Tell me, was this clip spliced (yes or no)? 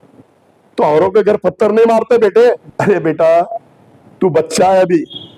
yes